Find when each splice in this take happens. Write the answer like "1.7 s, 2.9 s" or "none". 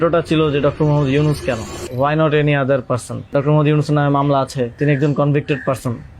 1.8 s, 3.3 s, 4.8 s